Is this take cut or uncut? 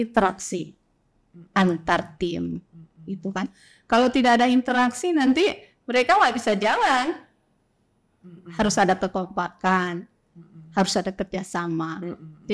uncut